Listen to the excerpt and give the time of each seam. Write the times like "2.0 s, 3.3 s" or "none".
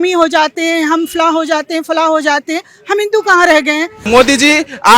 4.0 s